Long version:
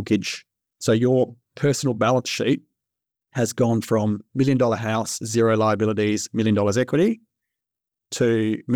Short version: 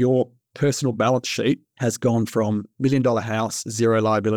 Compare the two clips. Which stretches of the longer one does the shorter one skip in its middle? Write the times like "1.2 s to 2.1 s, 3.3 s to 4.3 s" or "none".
2.7 s to 3.2 s